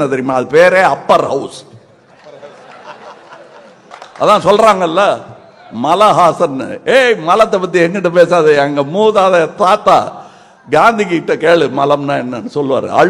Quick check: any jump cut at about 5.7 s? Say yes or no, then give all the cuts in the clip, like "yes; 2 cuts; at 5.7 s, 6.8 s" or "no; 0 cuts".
no; 1 cut; at 3.9 s